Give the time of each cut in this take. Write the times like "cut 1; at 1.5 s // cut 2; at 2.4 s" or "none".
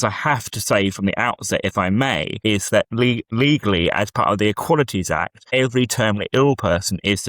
cut 1; at 2.3 s // cut 2; at 3.3 s // cut 3; at 5.4 s